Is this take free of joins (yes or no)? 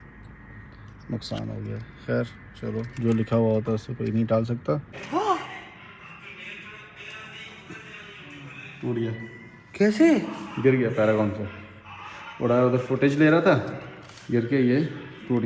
no